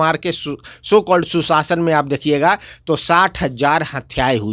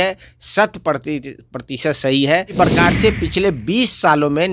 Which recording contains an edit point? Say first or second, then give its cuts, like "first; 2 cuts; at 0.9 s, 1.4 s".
second; 1 cut; at 2.5 s